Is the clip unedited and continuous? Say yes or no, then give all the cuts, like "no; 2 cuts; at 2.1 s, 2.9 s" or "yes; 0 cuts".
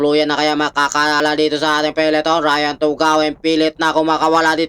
no; 1 cut; at 1.2 s